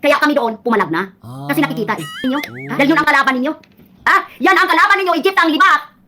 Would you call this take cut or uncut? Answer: cut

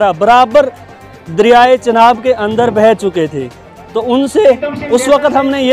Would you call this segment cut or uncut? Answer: uncut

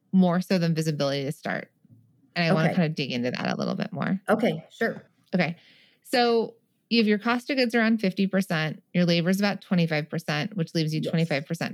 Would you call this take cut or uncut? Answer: cut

